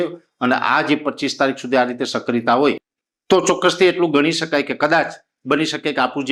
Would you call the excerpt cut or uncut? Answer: uncut